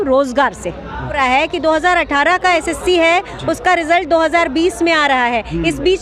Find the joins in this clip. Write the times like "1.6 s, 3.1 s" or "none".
1.2 s